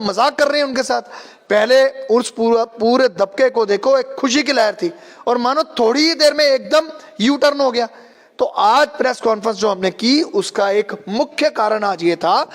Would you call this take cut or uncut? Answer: uncut